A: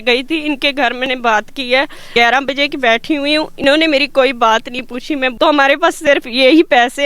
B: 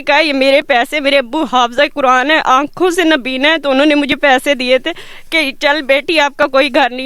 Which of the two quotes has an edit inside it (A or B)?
A